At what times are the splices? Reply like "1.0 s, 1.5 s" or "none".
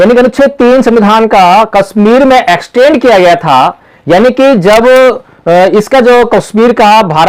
none